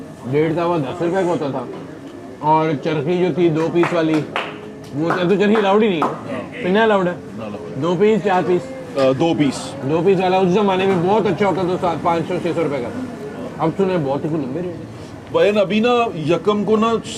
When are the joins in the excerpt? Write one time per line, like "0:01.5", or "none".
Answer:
none